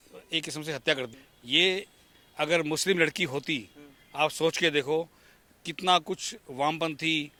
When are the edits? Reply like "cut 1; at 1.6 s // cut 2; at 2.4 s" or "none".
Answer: none